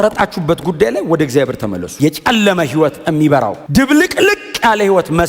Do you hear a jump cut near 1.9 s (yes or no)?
yes